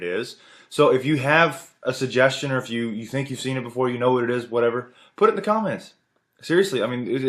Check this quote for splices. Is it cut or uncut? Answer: cut